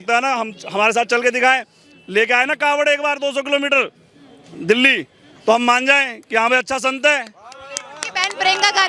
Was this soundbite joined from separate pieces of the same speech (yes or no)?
no